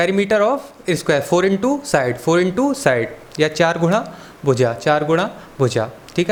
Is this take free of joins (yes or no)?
yes